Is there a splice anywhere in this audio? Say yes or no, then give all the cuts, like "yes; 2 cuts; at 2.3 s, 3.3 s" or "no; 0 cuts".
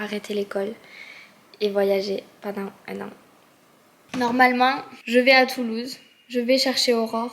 no; 0 cuts